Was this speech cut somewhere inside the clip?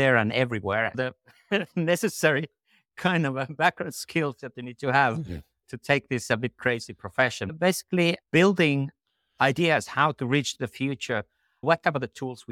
yes; 2 cuts; at 1.0 s, 7.5 s

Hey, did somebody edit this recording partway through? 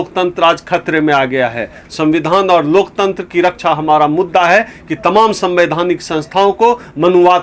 no; 0 cuts

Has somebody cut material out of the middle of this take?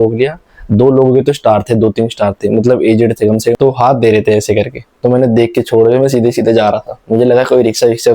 yes; 1 cut; at 3.4 s

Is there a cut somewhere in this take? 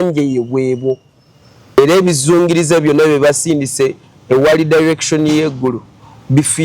yes; 1 cut; at 1.8 s

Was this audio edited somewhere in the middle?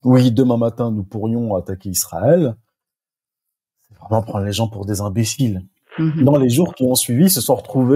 yes; 1 cut; at 5.8 s

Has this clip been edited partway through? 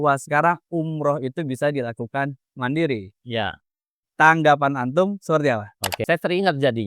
yes; 1 cut; at 6.0 s

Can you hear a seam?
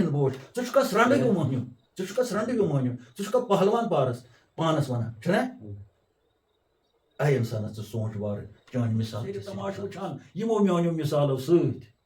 yes; 1 cut; at 9.4 s

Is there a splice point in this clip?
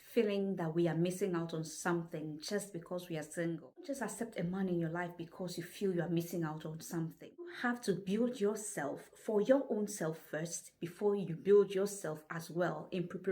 yes; 2 cuts; at 3.9 s, 7.5 s

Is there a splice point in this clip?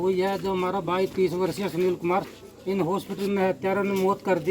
yes; 1 cut; at 2.4 s

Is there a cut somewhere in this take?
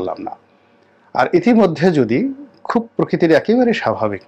no; 0 cuts

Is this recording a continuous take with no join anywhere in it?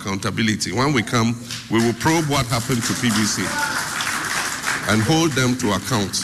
yes; 0 cuts

